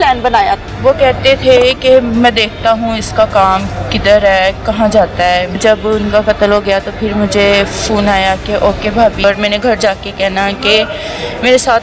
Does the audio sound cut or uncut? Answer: cut